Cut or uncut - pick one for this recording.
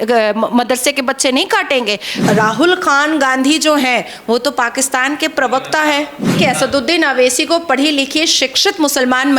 cut